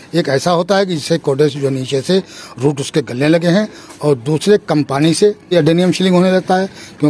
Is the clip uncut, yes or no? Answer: no